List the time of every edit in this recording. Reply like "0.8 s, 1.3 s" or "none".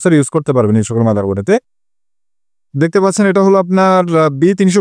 none